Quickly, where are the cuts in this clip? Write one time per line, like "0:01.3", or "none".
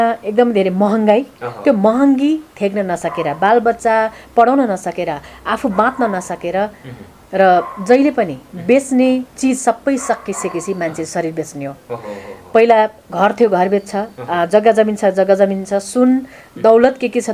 none

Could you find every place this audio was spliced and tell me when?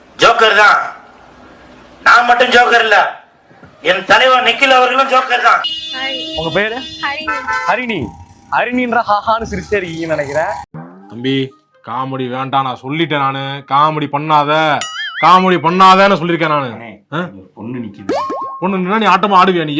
0:05.8

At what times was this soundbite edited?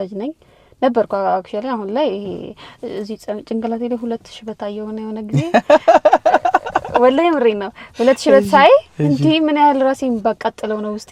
none

